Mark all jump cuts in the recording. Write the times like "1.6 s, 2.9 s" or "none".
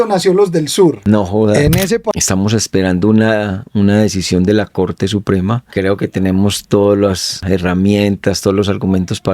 1.0 s, 2.1 s, 5.7 s, 7.3 s